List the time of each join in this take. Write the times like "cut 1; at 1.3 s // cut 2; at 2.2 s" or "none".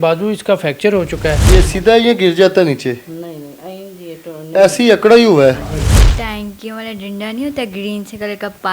cut 1; at 1.4 s // cut 2; at 6.0 s